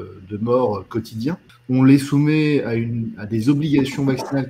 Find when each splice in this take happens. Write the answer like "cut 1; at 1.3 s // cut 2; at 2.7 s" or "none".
cut 1; at 1.5 s